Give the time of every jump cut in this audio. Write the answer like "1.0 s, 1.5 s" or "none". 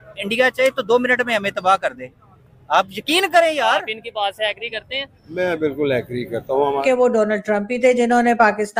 6.8 s